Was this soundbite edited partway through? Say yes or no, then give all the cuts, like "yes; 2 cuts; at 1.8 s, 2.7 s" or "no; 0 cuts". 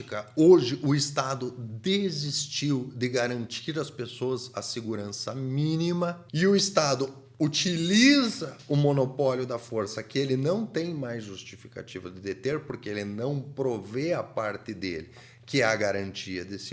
yes; 1 cut; at 6.2 s